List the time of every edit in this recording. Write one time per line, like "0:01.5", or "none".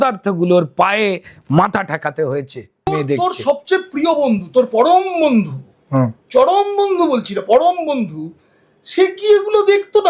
0:02.9

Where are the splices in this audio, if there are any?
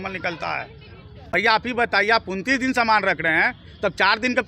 0:01.3

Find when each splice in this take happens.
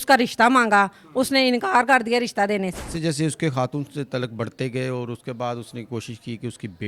0:02.9

